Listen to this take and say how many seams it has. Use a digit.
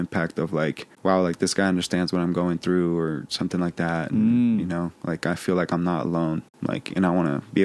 2